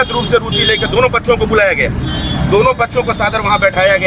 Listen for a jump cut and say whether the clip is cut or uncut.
uncut